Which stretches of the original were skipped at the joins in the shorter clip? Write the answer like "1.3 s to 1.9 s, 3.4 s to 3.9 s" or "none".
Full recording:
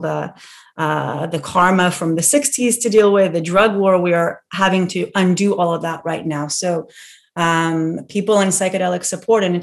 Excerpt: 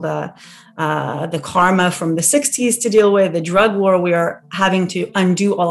none